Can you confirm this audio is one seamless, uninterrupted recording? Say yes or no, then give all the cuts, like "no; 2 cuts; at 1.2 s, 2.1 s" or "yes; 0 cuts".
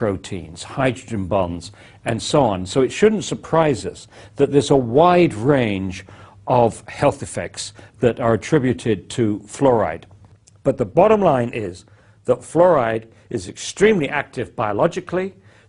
no; 1 cut; at 9.4 s